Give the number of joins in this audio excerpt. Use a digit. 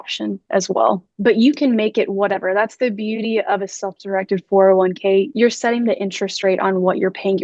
2